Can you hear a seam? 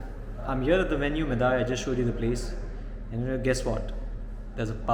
no; 0 cuts

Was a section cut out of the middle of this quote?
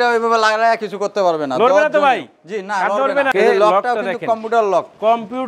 yes; 1 cut; at 3.3 s

